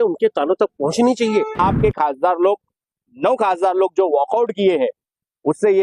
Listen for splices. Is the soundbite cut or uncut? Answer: cut